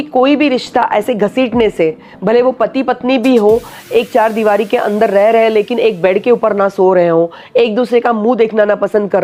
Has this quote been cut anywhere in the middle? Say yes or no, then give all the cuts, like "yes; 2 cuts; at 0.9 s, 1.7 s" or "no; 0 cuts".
no; 0 cuts